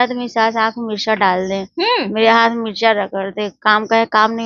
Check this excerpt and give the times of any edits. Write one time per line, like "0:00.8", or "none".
none